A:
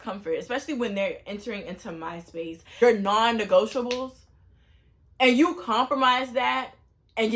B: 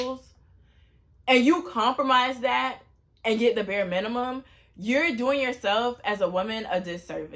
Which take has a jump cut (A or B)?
A